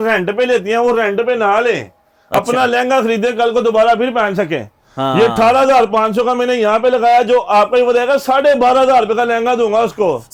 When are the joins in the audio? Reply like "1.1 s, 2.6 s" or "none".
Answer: none